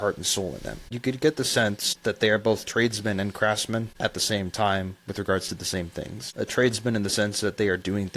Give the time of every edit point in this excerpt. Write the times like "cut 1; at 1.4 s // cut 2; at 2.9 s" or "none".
cut 1; at 0.9 s // cut 2; at 1.9 s // cut 3; at 3.9 s // cut 4; at 6.2 s